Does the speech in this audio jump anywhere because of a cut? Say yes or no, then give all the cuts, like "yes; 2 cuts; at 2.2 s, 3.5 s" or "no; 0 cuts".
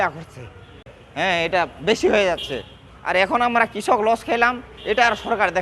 yes; 1 cut; at 1.0 s